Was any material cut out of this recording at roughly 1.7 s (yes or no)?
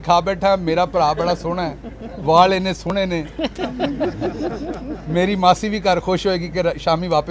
no